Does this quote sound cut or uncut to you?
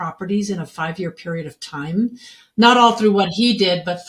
uncut